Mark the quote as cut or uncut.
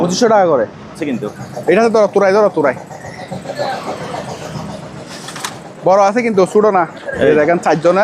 cut